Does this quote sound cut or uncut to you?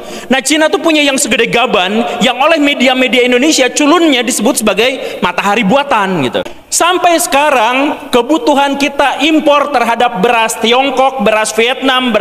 cut